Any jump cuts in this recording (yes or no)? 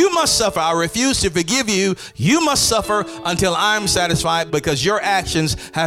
yes